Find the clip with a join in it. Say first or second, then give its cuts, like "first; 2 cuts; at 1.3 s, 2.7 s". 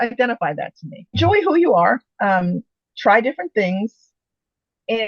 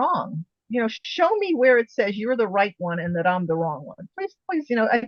first; 1 cut; at 1.1 s